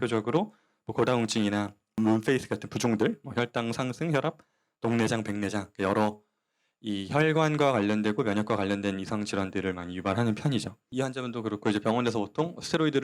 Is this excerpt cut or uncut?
uncut